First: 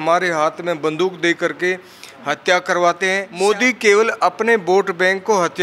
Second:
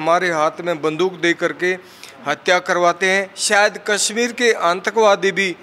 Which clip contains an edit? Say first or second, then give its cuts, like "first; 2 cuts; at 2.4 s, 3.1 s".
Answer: first; 1 cut; at 3.2 s